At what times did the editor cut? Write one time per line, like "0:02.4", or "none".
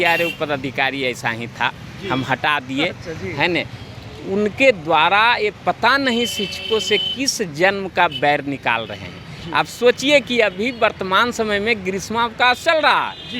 none